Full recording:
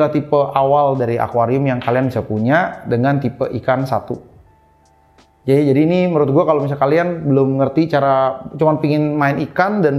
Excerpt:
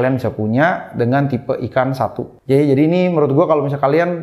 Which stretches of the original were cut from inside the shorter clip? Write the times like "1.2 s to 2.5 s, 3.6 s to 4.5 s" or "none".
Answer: 4.2 s to 5.3 s